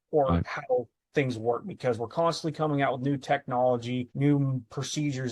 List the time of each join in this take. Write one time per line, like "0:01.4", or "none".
0:04.1